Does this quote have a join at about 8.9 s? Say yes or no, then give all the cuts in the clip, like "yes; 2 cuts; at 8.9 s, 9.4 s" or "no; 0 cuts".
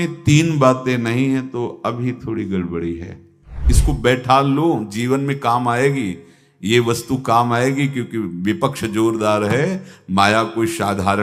no; 1 cut; at 3.6 s